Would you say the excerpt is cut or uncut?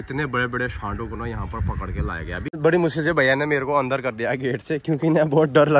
cut